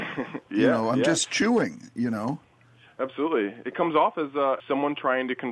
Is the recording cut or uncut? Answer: cut